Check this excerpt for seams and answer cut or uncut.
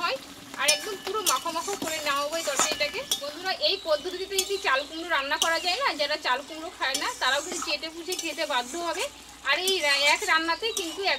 cut